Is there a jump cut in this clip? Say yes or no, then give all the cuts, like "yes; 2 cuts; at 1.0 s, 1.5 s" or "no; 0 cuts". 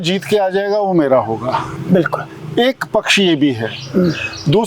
no; 0 cuts